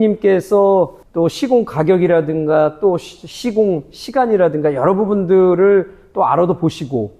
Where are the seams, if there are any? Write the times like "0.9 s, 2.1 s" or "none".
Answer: 1.0 s